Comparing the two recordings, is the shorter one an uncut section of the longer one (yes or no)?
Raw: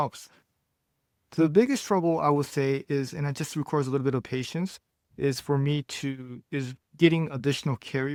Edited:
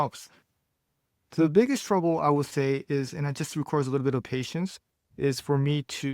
yes